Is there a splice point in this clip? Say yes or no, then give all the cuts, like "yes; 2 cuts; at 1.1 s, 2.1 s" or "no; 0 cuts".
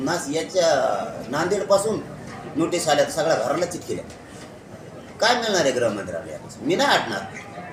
no; 0 cuts